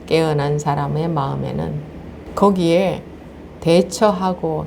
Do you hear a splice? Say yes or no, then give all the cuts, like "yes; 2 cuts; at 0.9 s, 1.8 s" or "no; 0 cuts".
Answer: yes; 1 cut; at 2.2 s